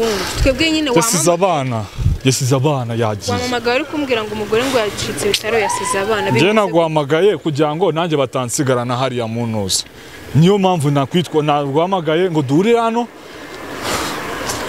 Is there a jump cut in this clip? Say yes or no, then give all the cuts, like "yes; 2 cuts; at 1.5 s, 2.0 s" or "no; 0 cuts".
no; 0 cuts